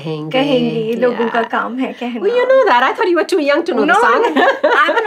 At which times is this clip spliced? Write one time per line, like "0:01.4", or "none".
none